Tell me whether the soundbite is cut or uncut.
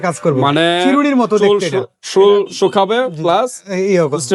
uncut